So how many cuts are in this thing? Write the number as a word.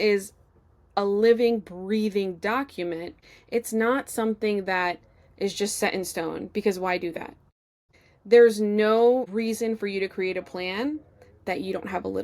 two